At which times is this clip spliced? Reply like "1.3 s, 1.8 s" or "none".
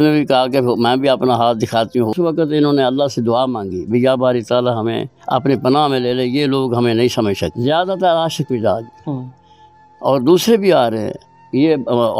2.1 s, 7.5 s